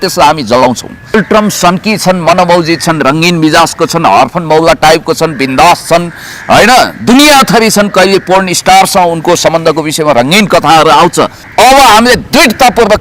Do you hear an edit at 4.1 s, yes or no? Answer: no